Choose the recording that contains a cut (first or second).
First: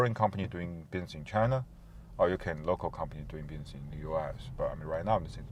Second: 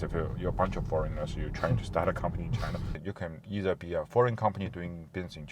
second